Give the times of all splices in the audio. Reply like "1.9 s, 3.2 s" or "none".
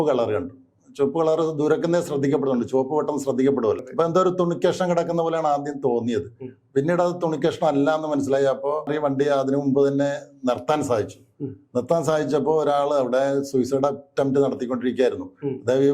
3.8 s, 8.9 s